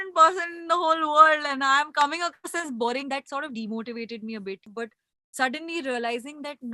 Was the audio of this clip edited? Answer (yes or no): yes